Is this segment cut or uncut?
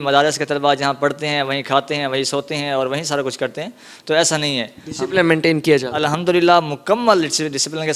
uncut